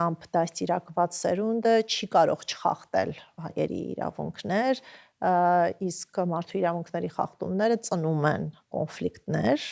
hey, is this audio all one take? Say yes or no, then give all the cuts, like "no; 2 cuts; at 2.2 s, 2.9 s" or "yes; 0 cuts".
yes; 0 cuts